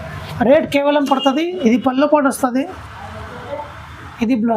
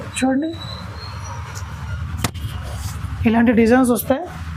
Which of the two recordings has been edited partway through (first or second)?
first